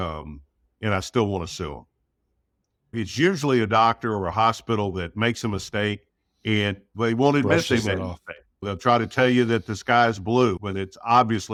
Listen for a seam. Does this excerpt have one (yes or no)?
no